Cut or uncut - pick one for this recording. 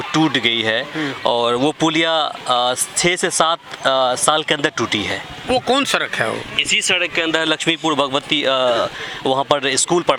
uncut